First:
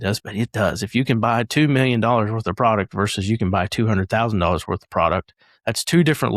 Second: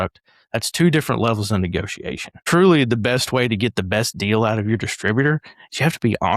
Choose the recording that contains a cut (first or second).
second